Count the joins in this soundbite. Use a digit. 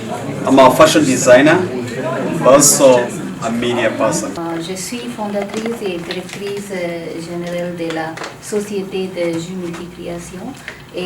1